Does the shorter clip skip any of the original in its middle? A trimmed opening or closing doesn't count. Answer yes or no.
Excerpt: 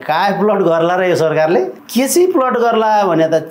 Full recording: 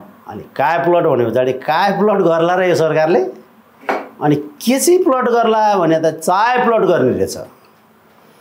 yes